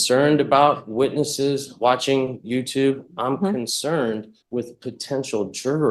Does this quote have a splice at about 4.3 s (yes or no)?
yes